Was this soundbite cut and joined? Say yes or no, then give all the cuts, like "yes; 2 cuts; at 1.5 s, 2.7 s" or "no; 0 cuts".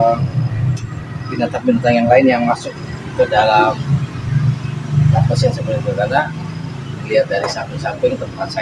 no; 0 cuts